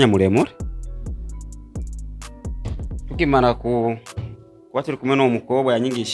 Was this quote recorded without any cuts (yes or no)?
yes